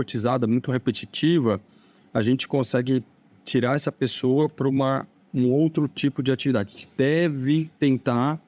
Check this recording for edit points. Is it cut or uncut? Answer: uncut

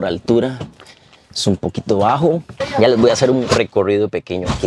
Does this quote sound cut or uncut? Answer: cut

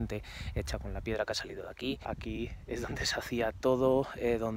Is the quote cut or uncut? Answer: cut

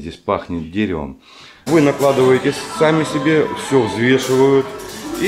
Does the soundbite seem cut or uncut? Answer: cut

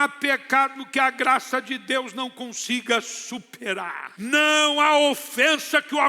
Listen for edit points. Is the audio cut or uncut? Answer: cut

